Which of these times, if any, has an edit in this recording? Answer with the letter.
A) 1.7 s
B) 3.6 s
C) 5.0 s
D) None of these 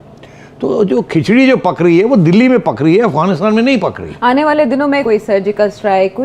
C